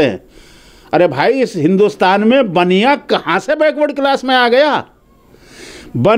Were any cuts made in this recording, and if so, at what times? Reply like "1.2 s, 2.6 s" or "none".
none

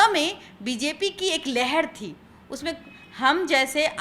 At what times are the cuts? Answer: none

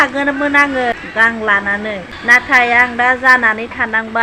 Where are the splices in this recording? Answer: 0.9 s, 2.1 s

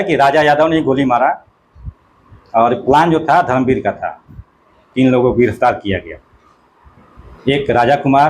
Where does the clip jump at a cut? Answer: 4.9 s

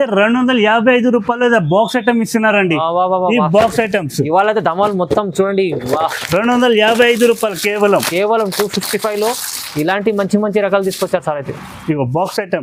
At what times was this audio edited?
none

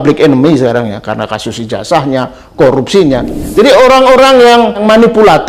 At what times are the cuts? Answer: 3.4 s

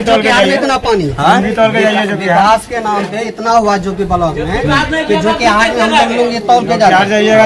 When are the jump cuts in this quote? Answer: none

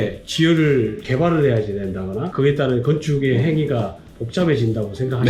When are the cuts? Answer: 1.1 s, 2.3 s

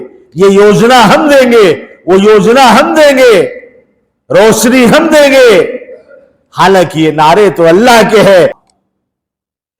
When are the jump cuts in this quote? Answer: 8.6 s

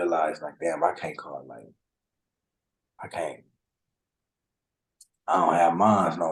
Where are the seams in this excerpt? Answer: none

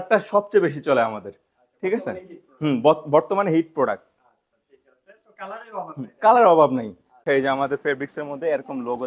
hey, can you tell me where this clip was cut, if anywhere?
7.2 s

